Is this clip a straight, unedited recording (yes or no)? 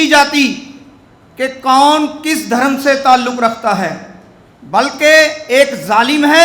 yes